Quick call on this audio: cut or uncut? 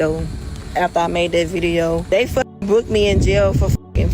cut